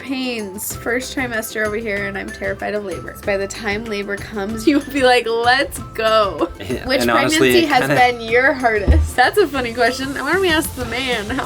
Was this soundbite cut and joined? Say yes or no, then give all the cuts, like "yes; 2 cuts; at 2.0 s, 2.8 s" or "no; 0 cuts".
yes; 4 cuts; at 3.2 s, 4.6 s, 6.5 s, 9.1 s